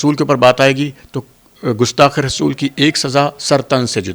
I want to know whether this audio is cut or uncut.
uncut